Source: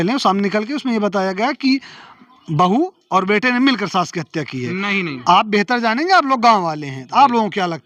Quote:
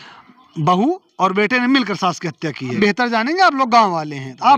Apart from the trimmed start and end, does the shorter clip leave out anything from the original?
yes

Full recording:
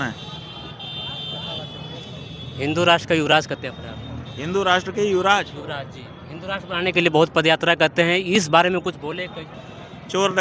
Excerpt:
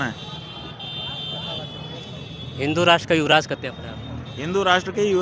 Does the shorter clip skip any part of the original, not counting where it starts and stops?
no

